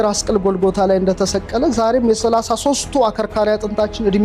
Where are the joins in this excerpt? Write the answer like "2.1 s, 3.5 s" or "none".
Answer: none